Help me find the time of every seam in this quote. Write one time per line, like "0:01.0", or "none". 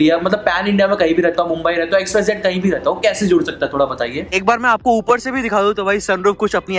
0:04.2